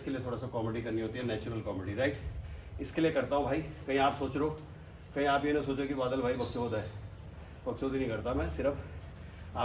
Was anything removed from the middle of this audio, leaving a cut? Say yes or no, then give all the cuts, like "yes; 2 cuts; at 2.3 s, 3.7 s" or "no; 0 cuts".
no; 0 cuts